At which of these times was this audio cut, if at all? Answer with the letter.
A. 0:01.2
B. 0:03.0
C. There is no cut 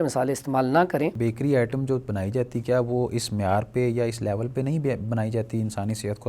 A